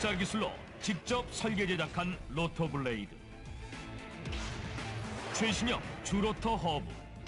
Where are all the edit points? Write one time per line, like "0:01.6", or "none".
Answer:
0:03.7